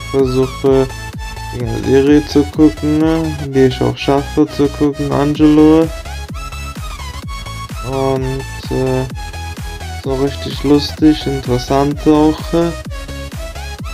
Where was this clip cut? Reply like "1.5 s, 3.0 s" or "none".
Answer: none